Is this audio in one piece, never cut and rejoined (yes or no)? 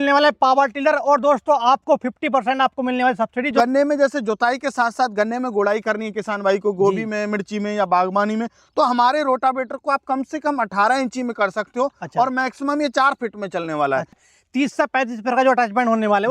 no